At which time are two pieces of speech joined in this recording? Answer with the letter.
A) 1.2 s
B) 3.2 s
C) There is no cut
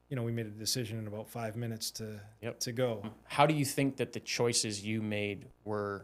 B